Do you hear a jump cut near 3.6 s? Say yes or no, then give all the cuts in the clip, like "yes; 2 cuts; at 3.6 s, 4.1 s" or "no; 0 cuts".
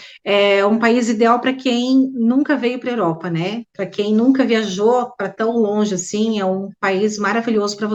no; 0 cuts